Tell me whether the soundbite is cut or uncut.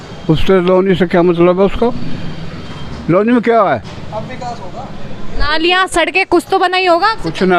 uncut